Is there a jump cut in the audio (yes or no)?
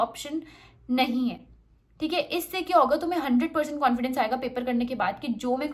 no